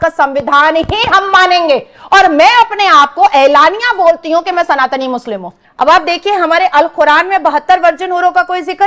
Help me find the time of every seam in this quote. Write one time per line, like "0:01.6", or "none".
0:05.6